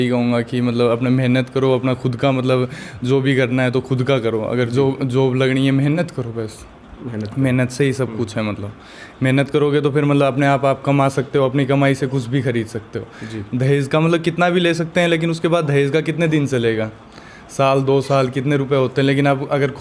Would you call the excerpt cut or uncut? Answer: uncut